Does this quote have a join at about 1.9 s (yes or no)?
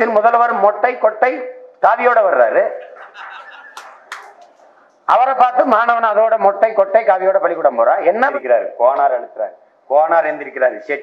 no